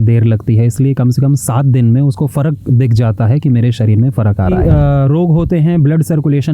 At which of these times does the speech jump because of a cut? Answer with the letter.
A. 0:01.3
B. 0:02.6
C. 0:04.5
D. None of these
C